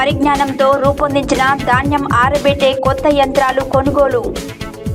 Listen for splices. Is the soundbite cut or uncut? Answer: uncut